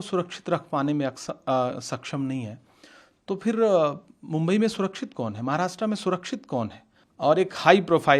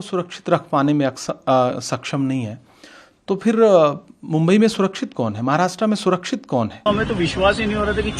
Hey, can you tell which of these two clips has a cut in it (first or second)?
second